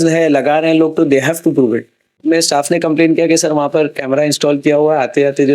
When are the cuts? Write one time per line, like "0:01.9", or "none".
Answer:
0:02.2

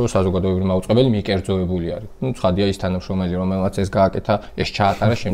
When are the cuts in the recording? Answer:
none

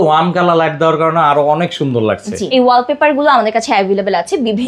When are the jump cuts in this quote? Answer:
0:02.4

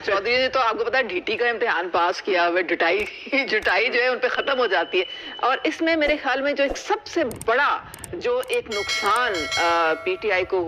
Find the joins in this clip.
0:05.2

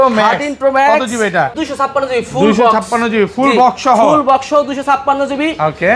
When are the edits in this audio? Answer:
0:01.6

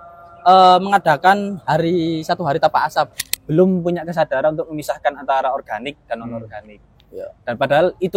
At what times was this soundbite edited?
0:03.2

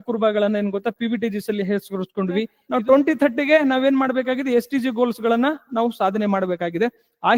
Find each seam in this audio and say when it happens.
0:02.6

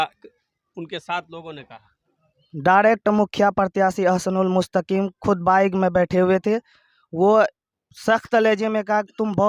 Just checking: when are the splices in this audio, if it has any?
none

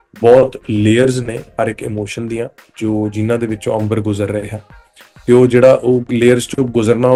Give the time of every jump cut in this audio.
none

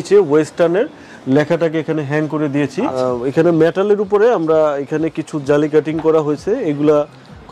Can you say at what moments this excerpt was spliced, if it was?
0:03.0

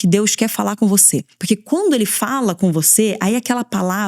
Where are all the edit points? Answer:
0:01.3

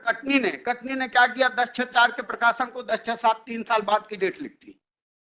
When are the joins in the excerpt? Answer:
none

